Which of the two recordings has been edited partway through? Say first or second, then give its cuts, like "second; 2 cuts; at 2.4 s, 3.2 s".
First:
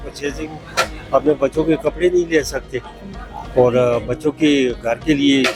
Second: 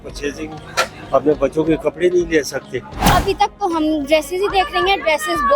second; 1 cut; at 3.0 s